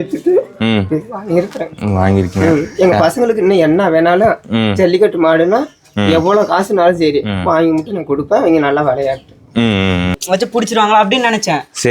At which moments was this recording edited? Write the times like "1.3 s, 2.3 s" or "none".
10.2 s